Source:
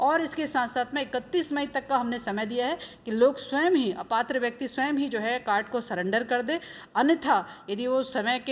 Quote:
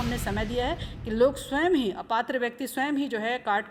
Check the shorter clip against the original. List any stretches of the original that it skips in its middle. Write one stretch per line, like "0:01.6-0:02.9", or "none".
none

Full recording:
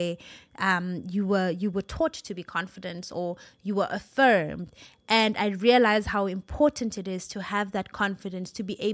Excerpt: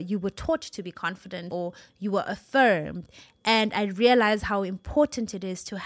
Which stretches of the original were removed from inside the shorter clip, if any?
0:02.9-0:03.1

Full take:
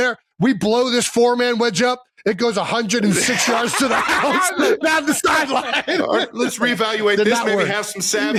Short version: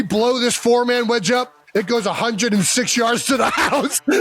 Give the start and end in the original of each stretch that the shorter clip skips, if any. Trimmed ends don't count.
none

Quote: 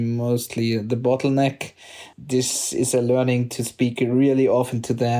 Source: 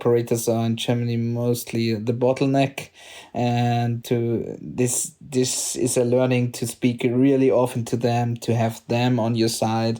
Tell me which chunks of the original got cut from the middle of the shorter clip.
0:03.2-0:05.1

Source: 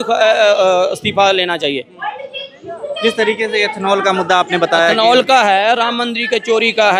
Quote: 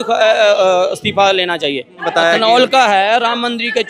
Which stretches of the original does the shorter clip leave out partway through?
0:02.1-0:04.6

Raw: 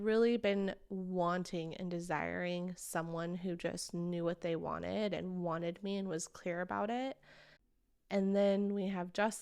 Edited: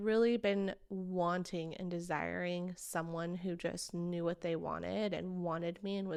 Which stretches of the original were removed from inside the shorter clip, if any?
none

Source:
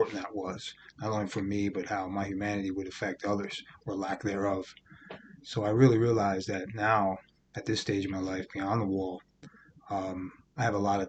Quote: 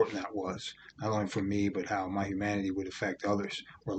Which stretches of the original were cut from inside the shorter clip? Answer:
none

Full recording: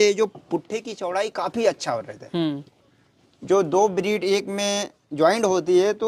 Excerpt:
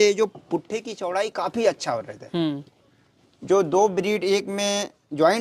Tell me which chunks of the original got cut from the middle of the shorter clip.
none

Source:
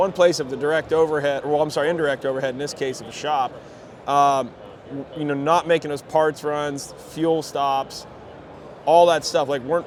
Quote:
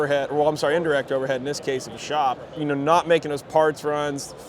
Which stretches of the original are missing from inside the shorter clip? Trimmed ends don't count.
0:03.6-0:05.1

